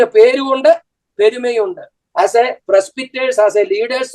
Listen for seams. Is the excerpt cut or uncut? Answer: cut